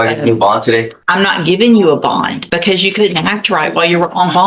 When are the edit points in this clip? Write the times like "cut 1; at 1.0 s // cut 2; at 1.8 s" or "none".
cut 1; at 1.0 s // cut 2; at 2.4 s